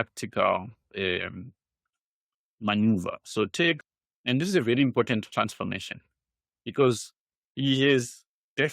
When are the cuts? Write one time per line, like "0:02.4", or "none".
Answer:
0:03.9